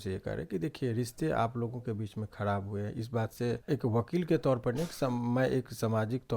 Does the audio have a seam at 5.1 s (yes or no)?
no